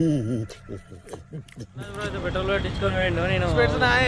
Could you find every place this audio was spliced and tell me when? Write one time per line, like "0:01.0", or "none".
0:02.2